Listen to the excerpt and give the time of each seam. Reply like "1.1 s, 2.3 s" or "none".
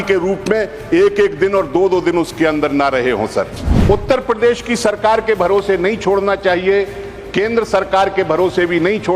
3.7 s